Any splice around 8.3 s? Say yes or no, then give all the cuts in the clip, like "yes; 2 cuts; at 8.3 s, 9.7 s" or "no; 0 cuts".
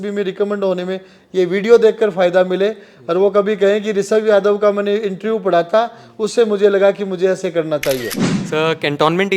yes; 1 cut; at 8.3 s